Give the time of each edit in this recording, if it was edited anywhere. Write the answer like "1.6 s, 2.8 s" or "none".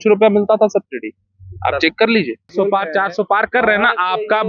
2.5 s